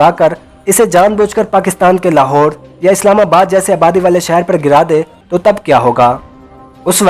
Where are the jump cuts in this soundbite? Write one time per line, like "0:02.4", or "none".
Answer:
0:05.2